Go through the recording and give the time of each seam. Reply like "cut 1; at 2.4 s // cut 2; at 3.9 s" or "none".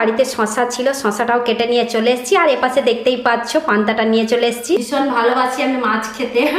cut 1; at 4.9 s